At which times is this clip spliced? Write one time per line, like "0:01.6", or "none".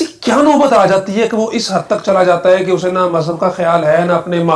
none